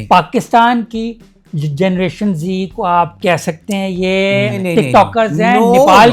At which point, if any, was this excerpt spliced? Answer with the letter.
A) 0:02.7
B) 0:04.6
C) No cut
B